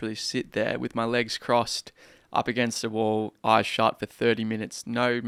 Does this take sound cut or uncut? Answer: uncut